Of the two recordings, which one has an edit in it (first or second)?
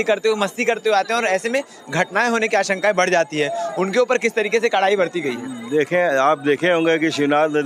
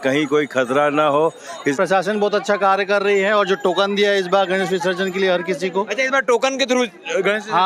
second